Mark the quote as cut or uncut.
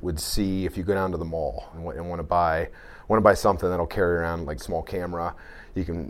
cut